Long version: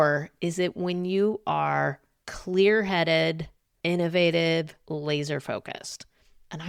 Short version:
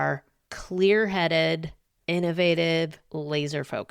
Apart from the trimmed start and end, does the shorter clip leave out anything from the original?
no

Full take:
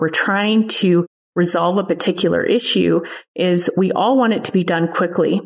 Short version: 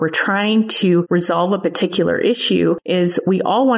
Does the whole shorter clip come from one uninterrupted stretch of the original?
no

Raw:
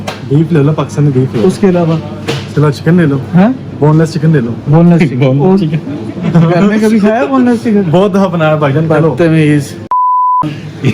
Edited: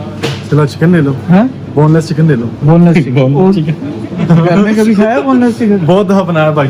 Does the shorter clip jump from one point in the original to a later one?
no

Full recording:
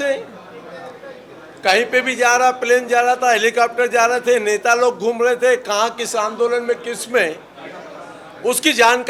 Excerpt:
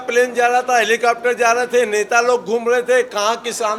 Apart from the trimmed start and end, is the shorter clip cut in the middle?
no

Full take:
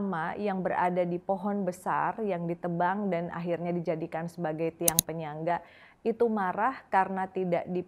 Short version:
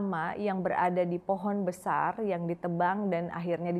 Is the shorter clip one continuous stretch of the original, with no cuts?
yes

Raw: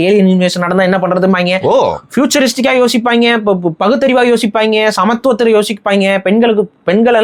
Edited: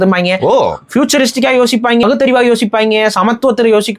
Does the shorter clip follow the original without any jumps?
no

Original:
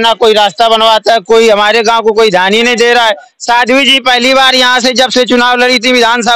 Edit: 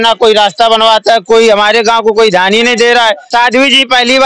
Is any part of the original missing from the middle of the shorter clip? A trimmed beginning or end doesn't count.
yes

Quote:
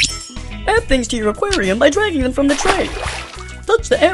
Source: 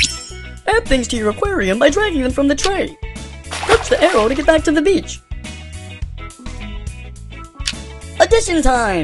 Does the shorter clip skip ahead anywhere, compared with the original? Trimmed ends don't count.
no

